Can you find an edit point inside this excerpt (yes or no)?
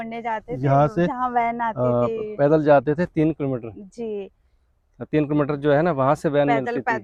no